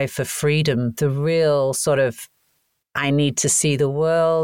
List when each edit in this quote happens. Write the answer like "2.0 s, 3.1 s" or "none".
0.9 s